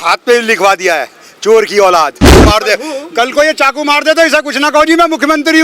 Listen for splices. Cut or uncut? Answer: cut